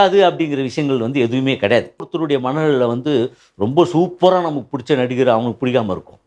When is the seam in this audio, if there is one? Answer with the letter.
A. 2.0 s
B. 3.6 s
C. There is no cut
A